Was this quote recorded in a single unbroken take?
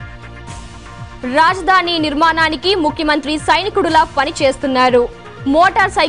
yes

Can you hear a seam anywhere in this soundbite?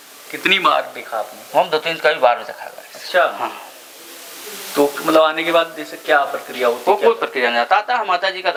no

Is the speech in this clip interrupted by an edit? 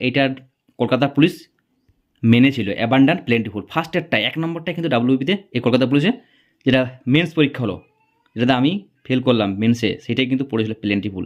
no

